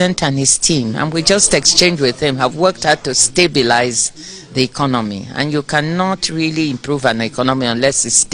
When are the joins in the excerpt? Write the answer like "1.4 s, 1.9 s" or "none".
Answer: none